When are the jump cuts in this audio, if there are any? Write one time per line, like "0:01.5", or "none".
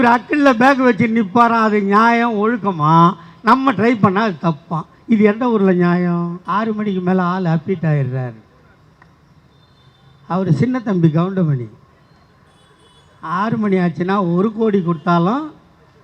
0:06.4